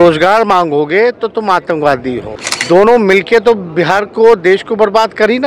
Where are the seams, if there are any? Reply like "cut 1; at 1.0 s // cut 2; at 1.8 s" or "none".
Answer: cut 1; at 2.3 s